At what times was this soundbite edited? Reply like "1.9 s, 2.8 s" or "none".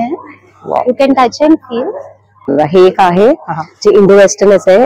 2.5 s